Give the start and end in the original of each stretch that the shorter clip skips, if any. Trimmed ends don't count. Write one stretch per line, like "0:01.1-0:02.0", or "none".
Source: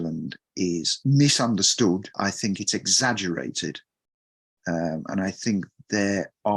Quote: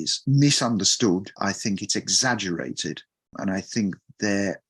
0:04.1-0:05.1